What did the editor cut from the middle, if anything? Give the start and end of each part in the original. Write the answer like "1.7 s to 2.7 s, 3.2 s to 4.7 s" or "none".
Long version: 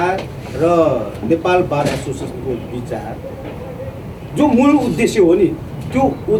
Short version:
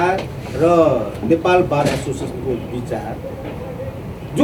none